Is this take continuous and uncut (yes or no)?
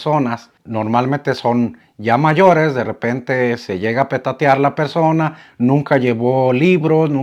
yes